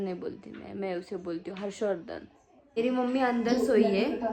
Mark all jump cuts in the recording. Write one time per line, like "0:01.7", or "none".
0:02.7

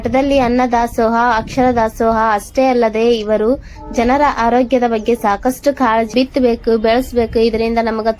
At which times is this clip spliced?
0:06.1

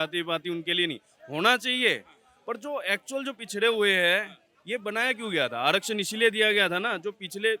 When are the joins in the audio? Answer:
none

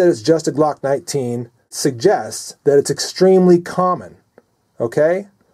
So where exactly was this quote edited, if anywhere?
0:01.7

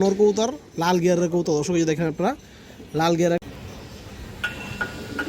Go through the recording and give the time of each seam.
0:03.4

